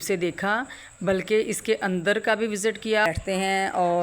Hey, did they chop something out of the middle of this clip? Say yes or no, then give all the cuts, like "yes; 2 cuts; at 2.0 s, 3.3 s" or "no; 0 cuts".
yes; 1 cut; at 3.0 s